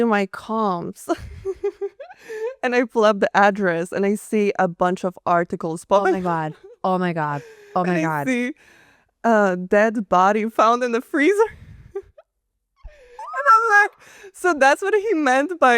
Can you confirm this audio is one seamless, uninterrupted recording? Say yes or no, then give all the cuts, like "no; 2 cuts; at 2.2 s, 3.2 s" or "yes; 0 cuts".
yes; 0 cuts